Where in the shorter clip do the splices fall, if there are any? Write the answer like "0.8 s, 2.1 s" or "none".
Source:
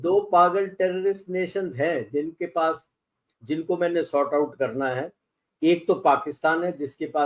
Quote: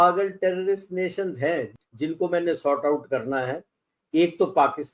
1.7 s